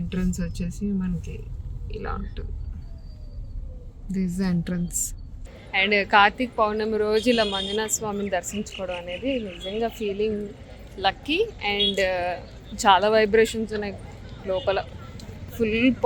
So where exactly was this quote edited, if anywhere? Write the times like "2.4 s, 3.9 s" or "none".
5.6 s